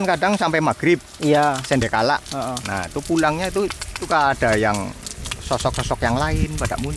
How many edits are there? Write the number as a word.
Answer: one